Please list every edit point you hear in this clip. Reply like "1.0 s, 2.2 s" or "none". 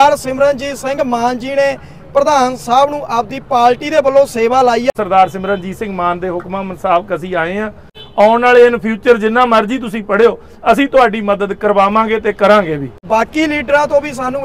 4.9 s, 8.0 s, 13.1 s